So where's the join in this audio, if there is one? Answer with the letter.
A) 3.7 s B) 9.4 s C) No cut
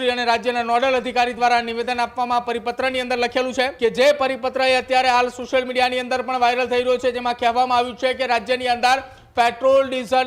A